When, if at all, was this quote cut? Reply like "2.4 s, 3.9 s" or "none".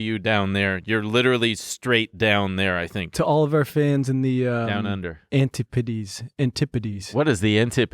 7.0 s